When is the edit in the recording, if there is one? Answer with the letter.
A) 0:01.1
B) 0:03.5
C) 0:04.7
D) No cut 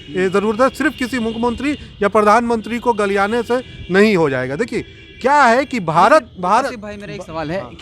D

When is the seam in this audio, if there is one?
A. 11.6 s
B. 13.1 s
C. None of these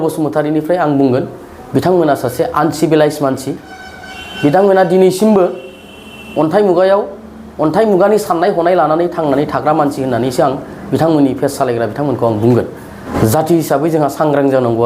B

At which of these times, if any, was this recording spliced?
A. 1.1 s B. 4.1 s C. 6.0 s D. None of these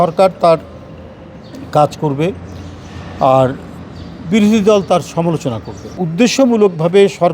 C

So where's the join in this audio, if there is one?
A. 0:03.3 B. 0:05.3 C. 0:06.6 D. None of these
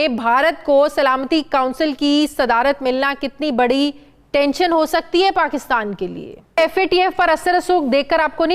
C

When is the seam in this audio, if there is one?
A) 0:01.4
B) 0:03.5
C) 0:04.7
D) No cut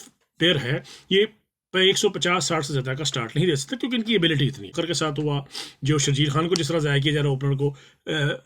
C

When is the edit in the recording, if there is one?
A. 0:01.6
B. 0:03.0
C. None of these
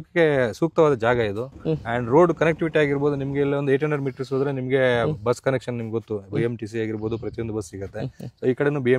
C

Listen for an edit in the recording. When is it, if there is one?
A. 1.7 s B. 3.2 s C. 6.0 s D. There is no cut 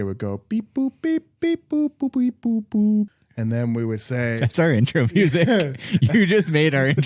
B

